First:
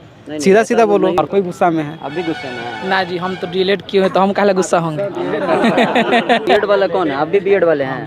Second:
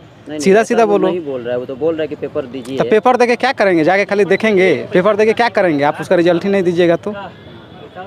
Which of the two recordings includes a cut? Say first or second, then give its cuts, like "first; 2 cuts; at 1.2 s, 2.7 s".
first; 2 cuts; at 1.2 s, 6.5 s